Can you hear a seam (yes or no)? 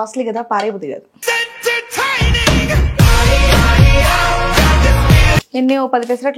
yes